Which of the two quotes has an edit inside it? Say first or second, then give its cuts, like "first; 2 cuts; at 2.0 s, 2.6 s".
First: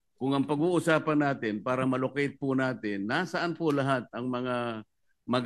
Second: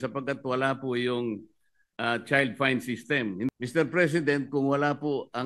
second; 1 cut; at 3.5 s